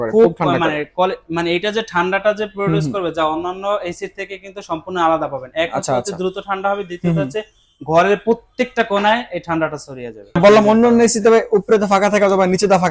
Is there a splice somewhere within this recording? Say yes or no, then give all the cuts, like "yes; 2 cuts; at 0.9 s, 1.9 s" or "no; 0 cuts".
yes; 1 cut; at 10.4 s